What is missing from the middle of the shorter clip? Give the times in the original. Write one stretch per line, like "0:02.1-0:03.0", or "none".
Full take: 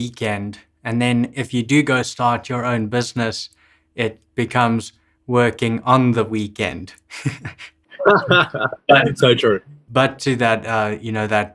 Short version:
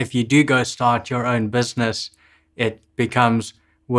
none